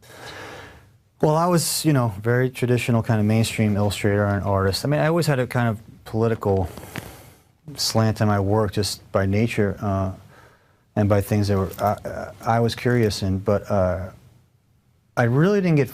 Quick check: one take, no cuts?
no; 1 cut; at 4.0 s

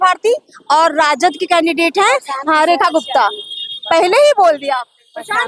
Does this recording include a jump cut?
no; 0 cuts

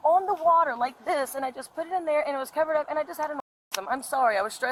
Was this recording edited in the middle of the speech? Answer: no; 0 cuts

